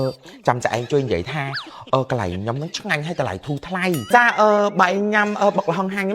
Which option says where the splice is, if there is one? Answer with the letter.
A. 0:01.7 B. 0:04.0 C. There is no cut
B